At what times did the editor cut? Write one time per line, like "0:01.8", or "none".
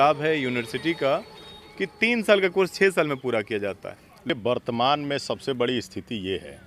0:04.3